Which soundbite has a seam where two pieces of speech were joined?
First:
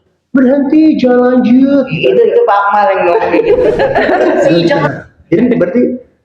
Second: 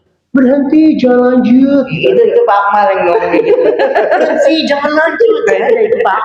first; 1 cut; at 4.5 s

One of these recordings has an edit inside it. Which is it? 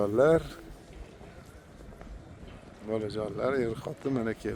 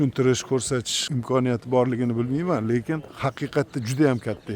second; 2 cuts; at 1.0 s, 3.1 s

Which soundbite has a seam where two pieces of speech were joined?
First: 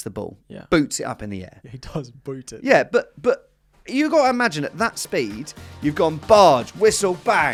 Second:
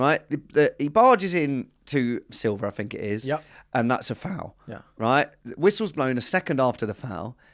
second; 1 cut; at 2.3 s

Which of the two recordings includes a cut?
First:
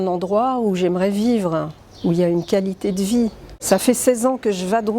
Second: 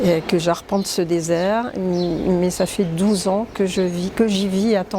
first; 1 cut; at 3.5 s

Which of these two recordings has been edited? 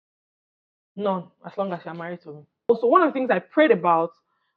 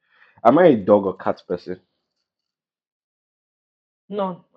first; 1 cut; at 2.7 s

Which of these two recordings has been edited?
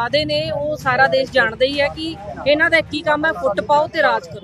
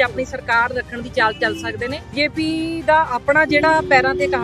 second; 1 cut; at 2.1 s

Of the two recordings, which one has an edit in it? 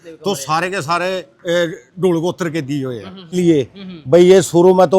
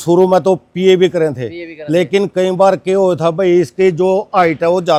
first; 1 cut; at 3.4 s

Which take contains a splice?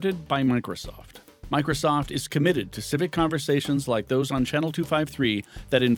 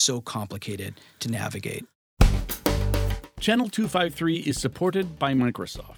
second; 1 cut; at 2.1 s

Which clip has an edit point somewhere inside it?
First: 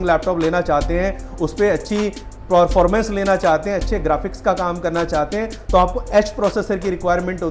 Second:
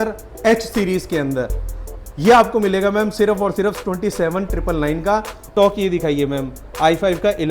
second; 1 cut; at 5.4 s

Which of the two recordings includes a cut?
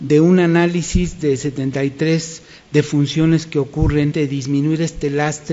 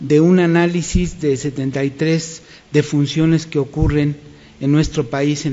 second; 1 cut; at 4.1 s

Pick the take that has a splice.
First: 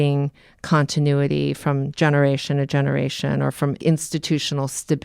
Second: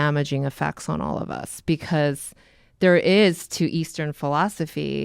first; 1 cut; at 3.8 s

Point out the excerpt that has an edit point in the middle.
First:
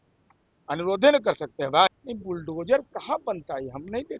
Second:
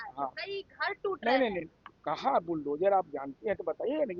first; 1 cut; at 1.9 s

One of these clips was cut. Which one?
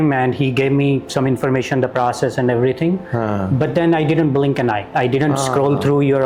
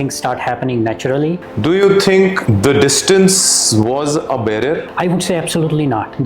second; 3 cuts; at 1.5 s, 2.4 s, 4.9 s

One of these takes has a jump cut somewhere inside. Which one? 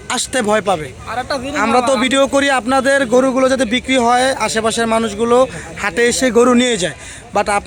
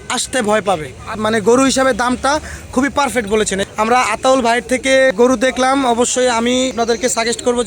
second; 4 cuts; at 1.2 s, 3.7 s, 5.1 s, 6.7 s

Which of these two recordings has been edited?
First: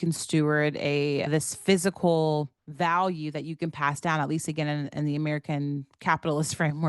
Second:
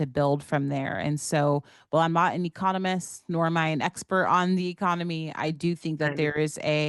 first; 2 cuts; at 1.3 s, 2.6 s

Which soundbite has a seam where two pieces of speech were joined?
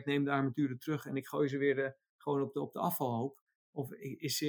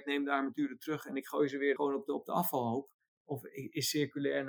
second; 1 cut; at 1.8 s

